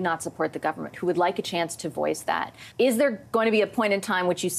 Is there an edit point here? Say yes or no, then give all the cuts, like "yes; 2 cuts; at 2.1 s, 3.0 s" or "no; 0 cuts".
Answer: yes; 1 cut; at 2.6 s